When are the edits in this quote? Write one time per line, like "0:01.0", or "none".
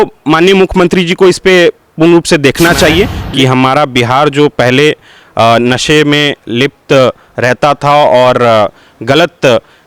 0:03.2